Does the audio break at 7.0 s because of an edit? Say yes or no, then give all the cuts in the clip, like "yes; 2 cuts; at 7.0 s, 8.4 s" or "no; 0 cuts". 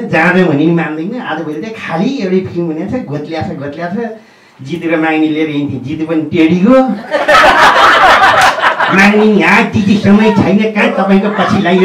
no; 0 cuts